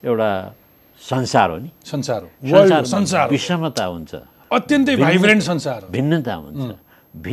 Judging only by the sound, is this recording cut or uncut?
uncut